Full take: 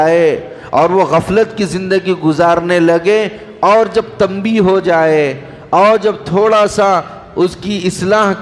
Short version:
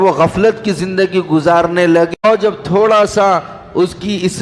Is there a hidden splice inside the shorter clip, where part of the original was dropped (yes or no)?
yes